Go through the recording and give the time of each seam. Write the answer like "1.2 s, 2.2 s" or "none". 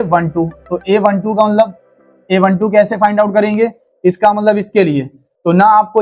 none